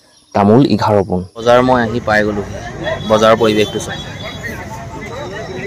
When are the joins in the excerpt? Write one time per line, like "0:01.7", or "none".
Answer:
0:01.3